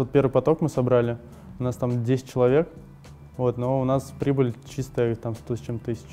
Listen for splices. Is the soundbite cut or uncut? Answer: uncut